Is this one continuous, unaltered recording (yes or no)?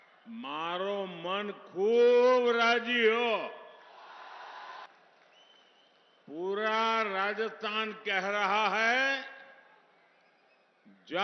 no